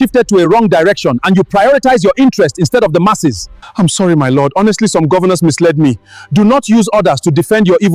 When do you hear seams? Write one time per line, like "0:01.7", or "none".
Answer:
none